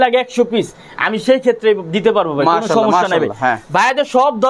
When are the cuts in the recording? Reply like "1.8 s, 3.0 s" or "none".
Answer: none